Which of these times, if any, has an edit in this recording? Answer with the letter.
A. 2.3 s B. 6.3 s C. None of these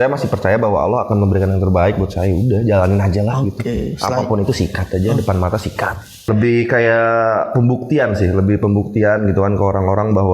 B